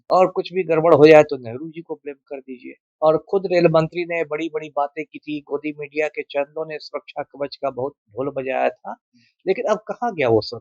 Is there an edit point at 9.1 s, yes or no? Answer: no